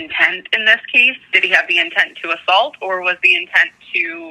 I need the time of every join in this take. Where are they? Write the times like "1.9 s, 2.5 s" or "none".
1.3 s